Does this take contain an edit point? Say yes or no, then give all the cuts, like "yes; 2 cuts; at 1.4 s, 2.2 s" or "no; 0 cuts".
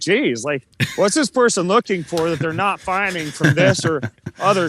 no; 0 cuts